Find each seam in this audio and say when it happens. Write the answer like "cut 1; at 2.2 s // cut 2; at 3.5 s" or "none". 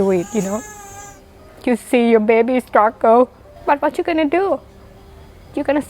cut 1; at 3.5 s